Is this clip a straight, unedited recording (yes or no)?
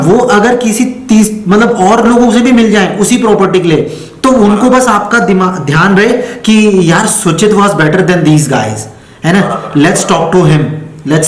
yes